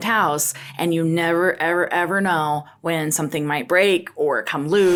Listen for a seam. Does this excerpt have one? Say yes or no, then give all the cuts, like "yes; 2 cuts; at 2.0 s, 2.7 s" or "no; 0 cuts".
no; 0 cuts